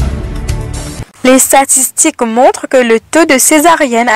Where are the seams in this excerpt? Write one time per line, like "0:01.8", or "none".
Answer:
0:01.1